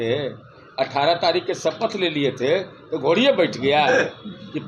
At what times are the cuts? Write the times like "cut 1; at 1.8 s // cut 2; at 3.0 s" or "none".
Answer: none